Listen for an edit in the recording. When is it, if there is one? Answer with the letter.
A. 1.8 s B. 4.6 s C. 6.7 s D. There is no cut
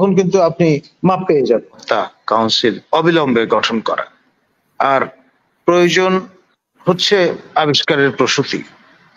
A